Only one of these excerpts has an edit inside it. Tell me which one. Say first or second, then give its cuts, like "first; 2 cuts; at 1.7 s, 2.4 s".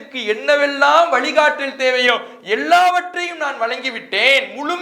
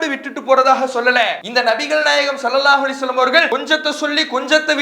second; 2 cuts; at 1.4 s, 3.5 s